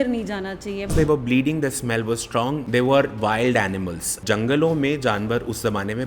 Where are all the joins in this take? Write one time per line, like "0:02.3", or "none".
0:00.9
0:02.6
0:04.1